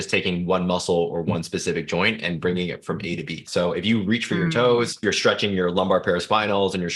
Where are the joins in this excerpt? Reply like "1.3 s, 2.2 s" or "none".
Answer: 3.4 s, 5.0 s